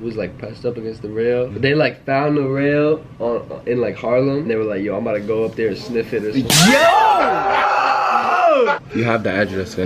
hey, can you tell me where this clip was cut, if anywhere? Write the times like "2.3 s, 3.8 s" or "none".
1.5 s, 4.4 s, 8.8 s